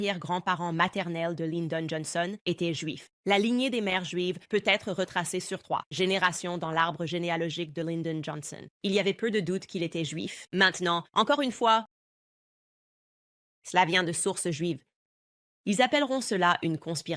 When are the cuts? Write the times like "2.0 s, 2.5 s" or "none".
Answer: 3.1 s